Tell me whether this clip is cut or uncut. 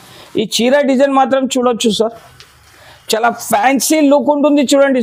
uncut